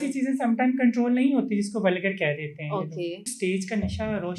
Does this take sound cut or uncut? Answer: cut